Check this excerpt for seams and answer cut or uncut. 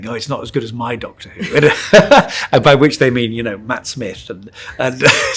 uncut